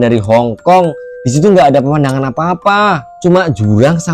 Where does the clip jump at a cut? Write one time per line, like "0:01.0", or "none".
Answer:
none

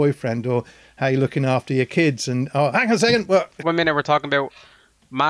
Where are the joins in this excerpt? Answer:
0:03.5

